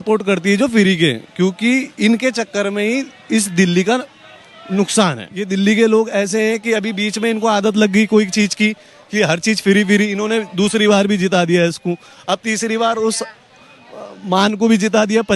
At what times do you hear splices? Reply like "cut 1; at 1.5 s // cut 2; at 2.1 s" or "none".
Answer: cut 1; at 5.5 s